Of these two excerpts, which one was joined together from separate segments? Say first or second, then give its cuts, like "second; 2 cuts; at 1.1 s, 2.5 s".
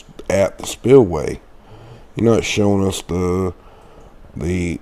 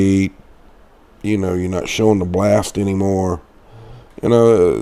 second; 1 cut; at 1.8 s